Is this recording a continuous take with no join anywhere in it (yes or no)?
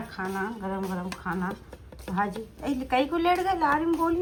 yes